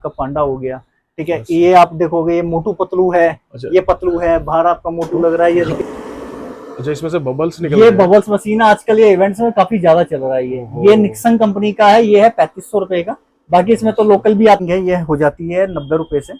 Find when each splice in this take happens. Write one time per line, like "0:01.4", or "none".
0:05.7
0:14.6